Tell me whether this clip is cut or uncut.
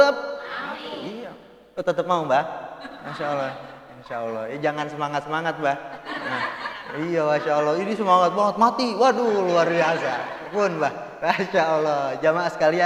uncut